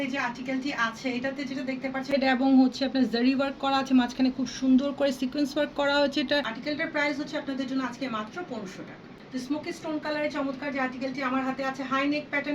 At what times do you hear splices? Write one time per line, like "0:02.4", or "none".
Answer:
0:02.1
0:06.5